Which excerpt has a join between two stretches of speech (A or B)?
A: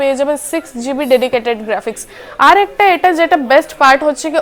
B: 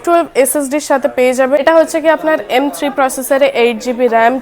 B